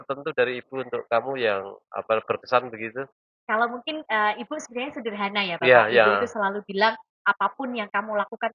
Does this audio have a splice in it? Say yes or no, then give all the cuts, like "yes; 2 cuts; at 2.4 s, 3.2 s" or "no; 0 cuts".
no; 0 cuts